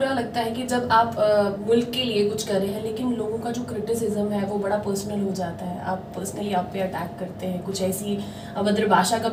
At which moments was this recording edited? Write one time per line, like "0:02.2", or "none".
none